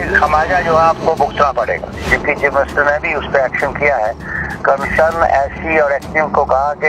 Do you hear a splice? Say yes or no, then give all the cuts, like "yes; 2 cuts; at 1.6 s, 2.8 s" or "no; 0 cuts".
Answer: yes; 1 cut; at 2.1 s